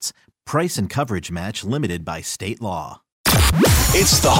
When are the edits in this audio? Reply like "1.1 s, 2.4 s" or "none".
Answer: 3.1 s